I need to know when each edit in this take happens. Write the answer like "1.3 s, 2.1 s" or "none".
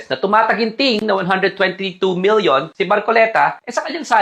2.7 s

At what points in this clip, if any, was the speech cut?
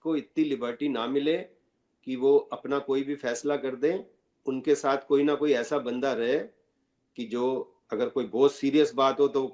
none

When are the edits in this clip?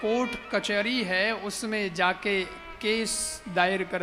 none

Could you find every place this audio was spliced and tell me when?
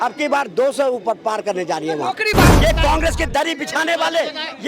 2.5 s

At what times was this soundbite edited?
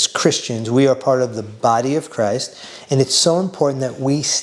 2.7 s

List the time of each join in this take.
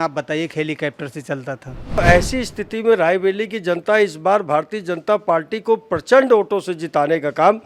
2.0 s

